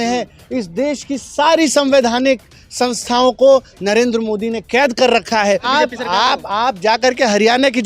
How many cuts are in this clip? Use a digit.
1